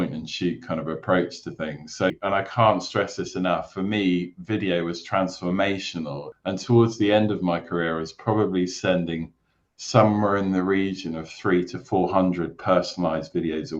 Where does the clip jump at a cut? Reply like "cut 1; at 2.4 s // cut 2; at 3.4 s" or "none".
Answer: cut 1; at 2.1 s // cut 2; at 6.2 s